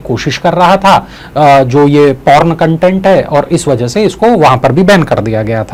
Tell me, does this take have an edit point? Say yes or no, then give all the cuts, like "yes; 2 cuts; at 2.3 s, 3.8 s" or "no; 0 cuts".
no; 0 cuts